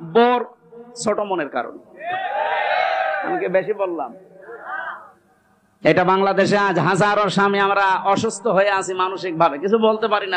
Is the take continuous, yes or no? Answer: yes